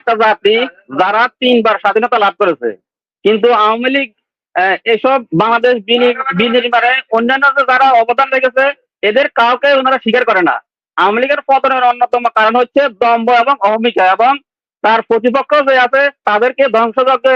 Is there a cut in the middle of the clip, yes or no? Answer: no